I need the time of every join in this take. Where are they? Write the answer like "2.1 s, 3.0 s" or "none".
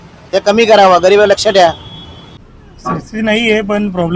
none